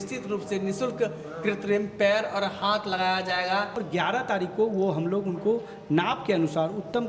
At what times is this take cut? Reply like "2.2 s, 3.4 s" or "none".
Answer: 3.8 s